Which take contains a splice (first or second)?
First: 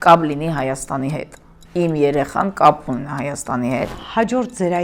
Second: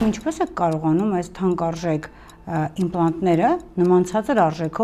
first